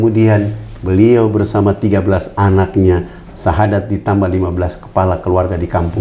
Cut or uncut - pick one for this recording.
uncut